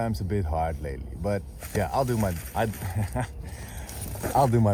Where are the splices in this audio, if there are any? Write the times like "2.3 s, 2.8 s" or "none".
none